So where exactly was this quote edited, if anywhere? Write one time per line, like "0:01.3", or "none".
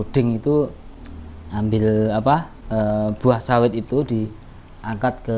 0:02.6